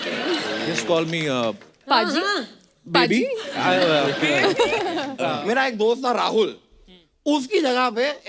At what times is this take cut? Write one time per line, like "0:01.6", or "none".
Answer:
0:05.2